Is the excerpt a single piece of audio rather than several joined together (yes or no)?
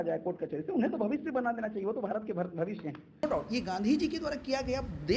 no